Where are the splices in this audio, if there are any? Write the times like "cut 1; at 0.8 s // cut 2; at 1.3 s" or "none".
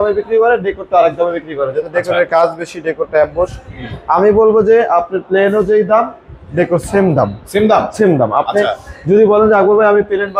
none